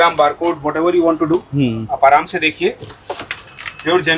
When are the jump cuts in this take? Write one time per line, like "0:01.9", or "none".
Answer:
none